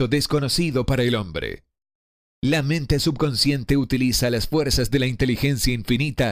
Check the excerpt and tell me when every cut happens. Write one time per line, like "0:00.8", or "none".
none

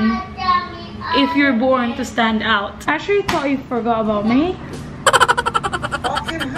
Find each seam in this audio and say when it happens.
0:02.7

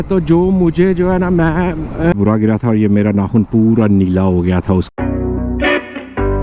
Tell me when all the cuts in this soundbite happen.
0:02.1
0:04.9

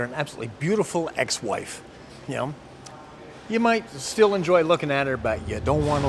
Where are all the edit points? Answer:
none

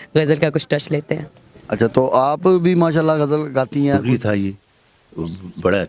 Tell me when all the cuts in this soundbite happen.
0:04.0

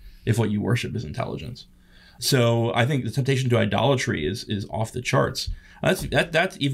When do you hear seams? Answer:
0:02.1

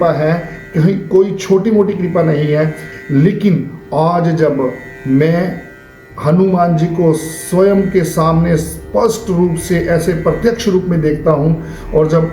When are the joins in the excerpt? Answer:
0:02.8

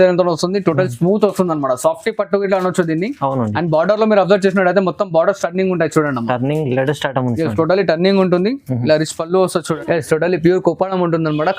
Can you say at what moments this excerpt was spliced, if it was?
0:09.7

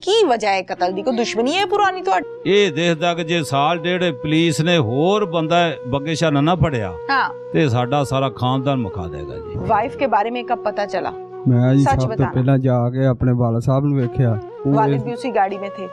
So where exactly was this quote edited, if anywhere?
none

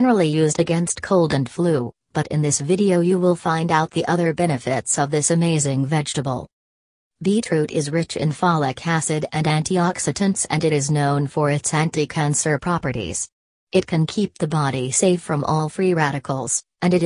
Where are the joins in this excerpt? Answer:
0:13.8

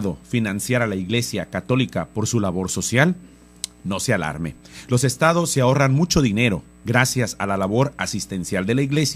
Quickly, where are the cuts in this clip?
0:01.3

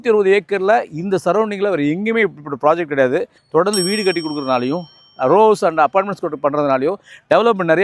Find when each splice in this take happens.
0:03.4

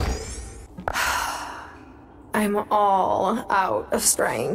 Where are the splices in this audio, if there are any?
0:00.9

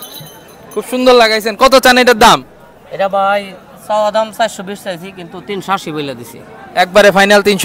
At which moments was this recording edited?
none

